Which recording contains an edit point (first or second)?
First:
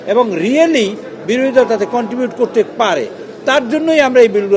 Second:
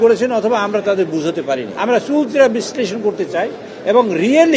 second